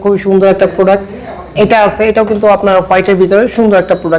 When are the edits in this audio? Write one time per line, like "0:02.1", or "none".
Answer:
none